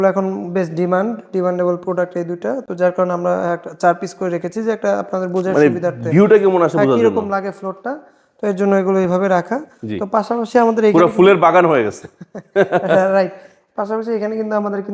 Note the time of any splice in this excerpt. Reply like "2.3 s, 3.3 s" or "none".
none